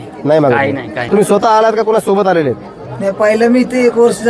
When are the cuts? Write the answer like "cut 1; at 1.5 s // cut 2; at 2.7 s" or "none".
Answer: cut 1; at 1.1 s